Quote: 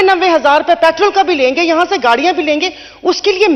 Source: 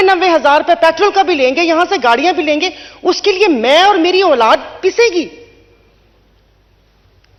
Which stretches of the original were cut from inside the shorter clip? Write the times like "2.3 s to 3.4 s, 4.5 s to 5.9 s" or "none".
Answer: none